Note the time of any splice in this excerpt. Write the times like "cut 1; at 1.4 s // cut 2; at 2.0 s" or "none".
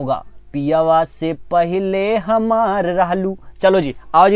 none